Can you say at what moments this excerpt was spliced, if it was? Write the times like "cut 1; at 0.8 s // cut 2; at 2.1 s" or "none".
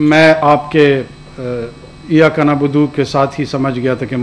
none

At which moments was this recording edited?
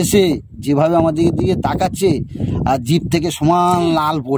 none

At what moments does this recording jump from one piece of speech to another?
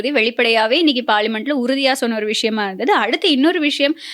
none

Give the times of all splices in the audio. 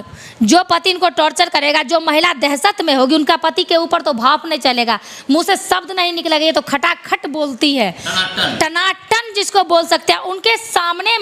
none

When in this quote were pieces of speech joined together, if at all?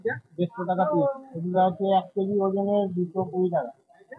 cut 1; at 1.3 s

